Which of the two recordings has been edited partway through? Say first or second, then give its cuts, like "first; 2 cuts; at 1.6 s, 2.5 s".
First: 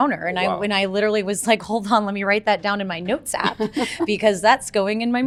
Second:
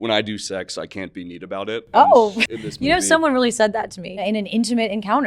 second; 2 cuts; at 2.4 s, 4.2 s